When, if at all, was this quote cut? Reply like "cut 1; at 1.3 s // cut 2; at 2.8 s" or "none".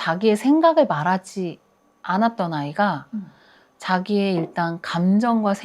none